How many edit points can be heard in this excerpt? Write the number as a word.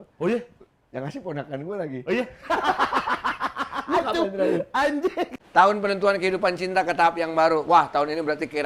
one